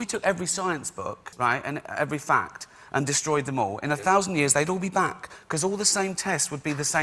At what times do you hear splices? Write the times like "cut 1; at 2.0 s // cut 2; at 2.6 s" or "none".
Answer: cut 1; at 1.2 s

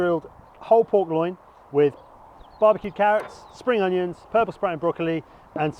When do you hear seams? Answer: none

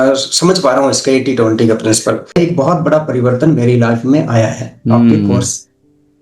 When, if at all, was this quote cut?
cut 1; at 2.3 s

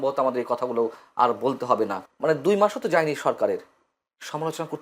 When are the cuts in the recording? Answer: cut 1; at 2.0 s

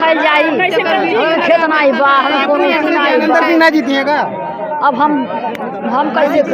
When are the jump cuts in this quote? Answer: none

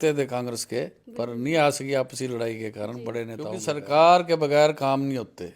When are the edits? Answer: cut 1; at 3.6 s

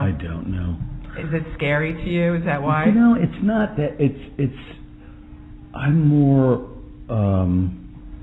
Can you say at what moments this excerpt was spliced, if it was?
cut 1; at 5.8 s

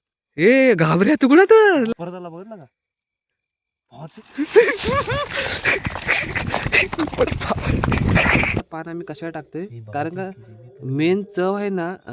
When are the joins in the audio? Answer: cut 1; at 2.0 s // cut 2; at 8.7 s

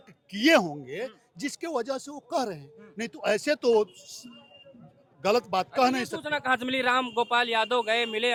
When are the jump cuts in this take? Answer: none

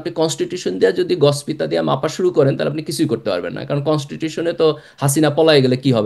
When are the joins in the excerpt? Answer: none

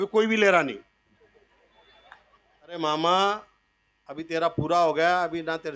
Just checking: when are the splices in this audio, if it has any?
cut 1; at 2.8 s

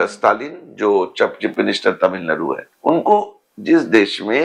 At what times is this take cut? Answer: cut 1; at 2.7 s

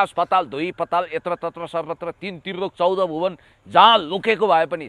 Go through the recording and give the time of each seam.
none

